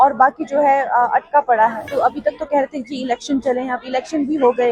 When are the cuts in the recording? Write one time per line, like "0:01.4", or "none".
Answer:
0:01.9